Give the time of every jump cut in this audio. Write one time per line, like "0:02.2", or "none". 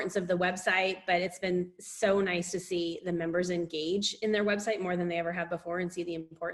none

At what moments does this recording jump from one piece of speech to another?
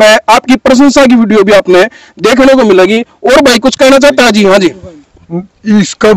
none

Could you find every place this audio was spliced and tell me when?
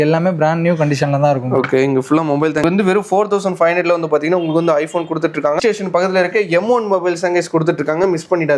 0:02.6
0:05.6

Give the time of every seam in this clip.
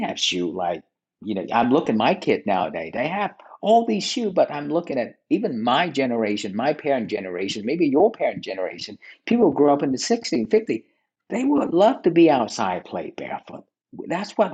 none

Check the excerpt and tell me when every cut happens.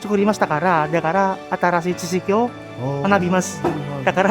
none

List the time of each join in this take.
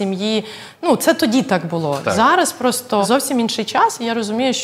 0:03.0

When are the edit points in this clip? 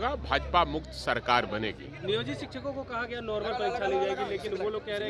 none

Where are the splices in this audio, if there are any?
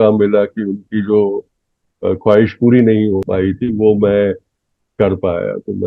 0:03.3

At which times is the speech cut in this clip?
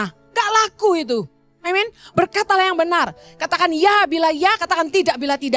none

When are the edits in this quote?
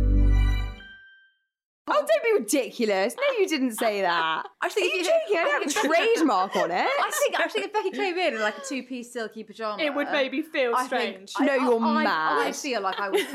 0:01.9

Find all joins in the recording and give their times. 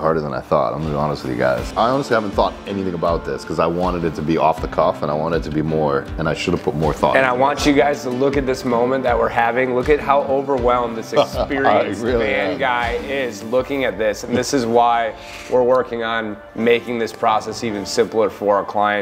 0:01.7

